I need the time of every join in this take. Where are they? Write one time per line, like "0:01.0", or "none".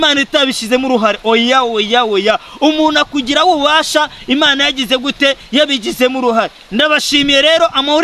none